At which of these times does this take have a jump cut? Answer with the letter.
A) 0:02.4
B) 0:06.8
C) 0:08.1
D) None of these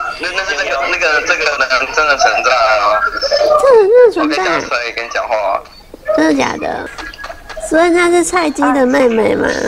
B